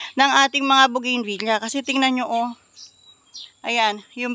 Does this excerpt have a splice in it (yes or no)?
no